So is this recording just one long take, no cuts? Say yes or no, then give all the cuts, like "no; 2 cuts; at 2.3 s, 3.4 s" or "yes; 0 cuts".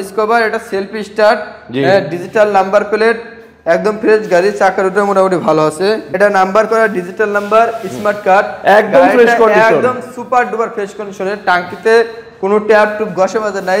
no; 1 cut; at 6.1 s